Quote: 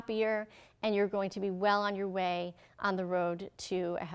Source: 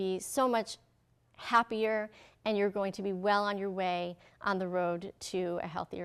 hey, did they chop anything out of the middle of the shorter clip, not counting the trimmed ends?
no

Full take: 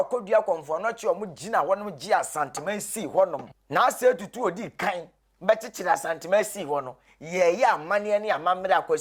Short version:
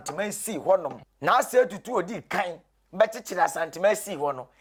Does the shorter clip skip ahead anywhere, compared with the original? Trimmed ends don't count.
no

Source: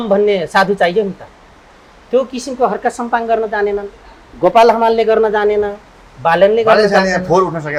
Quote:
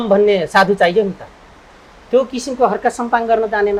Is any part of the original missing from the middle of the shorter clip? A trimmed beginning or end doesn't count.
no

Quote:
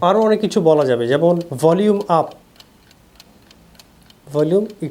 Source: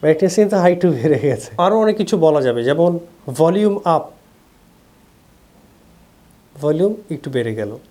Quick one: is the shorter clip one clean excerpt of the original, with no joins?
no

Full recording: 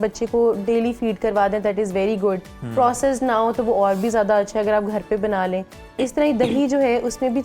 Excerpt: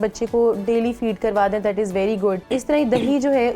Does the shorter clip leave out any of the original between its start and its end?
yes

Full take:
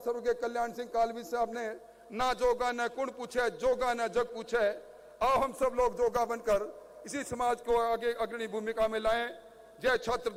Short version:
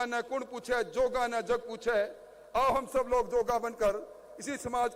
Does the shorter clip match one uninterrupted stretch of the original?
yes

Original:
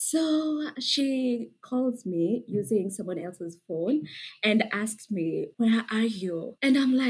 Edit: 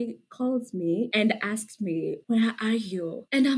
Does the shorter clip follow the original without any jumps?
no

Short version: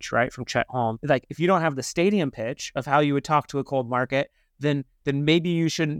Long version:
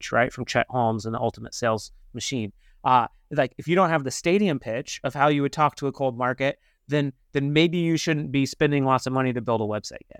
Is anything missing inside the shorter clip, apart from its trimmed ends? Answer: yes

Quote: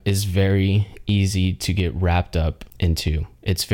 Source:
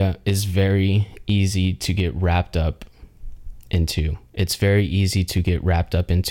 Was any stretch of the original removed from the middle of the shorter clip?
yes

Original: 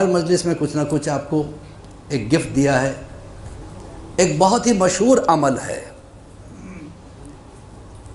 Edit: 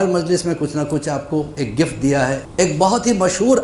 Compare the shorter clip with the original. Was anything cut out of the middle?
yes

